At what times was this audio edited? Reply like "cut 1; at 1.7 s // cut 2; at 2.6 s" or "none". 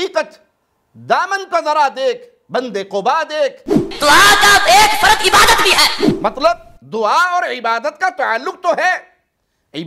cut 1; at 3.8 s